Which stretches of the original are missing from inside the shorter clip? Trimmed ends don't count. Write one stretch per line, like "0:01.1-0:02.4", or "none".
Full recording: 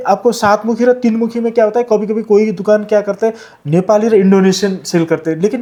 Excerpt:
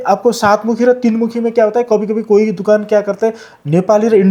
none